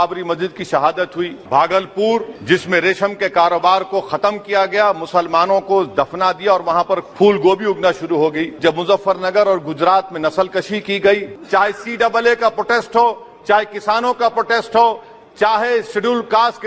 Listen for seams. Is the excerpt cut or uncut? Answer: cut